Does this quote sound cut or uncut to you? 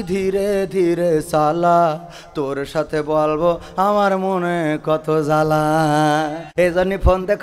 cut